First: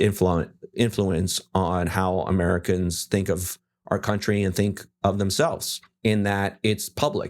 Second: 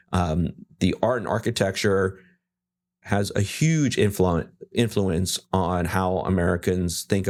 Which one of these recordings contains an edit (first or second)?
first